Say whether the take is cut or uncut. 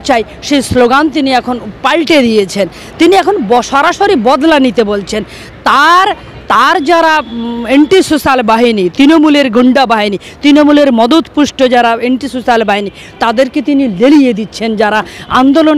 uncut